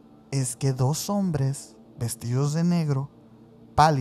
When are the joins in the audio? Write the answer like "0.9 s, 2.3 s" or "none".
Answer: none